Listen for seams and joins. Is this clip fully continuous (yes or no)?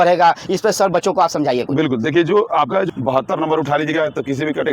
no